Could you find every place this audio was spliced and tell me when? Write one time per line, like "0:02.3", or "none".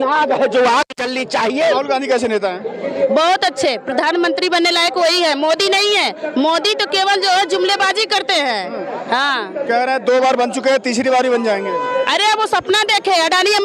0:01.6